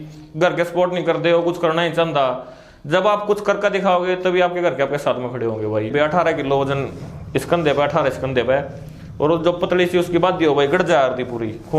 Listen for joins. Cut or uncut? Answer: cut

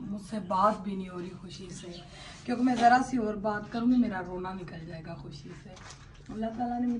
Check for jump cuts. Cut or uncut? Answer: uncut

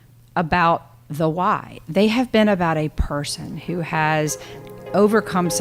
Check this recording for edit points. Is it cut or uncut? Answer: uncut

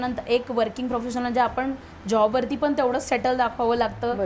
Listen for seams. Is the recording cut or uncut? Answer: uncut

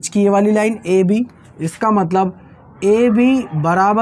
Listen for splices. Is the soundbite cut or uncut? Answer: uncut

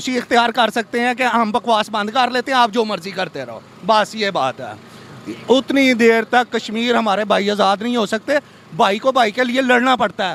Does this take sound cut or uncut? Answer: uncut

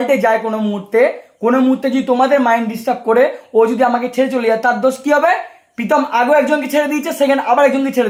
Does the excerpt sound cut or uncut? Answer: uncut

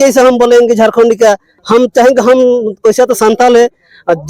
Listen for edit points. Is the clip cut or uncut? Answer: cut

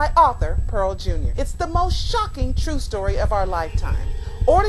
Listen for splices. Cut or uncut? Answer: cut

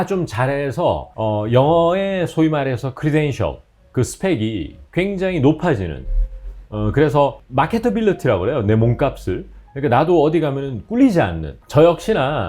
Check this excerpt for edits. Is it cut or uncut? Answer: cut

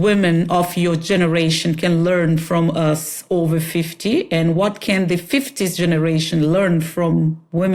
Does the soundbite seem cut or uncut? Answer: uncut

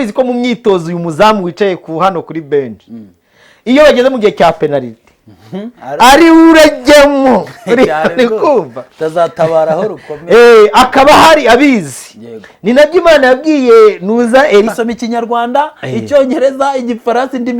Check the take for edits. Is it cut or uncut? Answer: cut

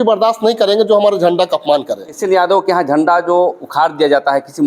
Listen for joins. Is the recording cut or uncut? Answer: cut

